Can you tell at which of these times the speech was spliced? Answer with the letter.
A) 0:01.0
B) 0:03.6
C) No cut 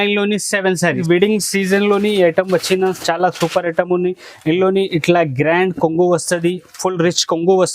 A